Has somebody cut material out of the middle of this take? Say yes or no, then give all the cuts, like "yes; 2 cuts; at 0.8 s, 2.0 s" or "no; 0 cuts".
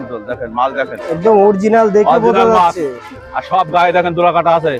no; 0 cuts